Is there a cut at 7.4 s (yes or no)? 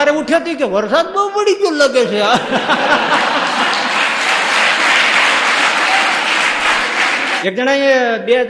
yes